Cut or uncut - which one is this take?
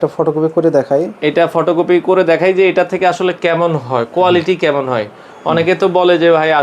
uncut